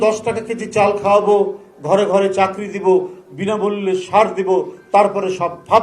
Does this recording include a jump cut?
no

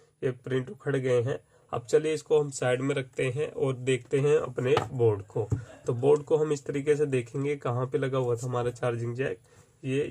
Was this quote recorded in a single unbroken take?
yes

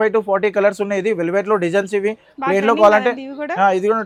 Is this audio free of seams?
yes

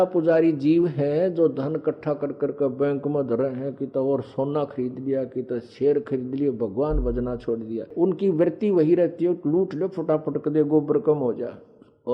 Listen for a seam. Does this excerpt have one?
yes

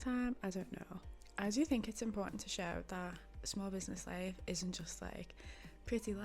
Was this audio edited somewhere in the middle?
yes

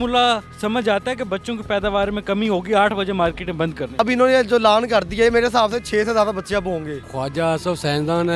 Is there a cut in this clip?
yes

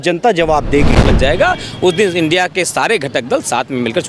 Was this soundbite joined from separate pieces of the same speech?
yes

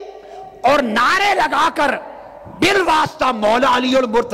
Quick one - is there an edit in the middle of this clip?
no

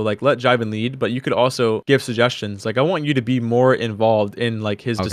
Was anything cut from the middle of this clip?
no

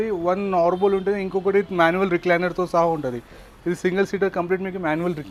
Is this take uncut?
yes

